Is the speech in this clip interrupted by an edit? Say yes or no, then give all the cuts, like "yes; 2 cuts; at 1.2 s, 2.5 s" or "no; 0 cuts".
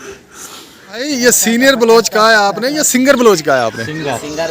yes; 1 cut; at 0.9 s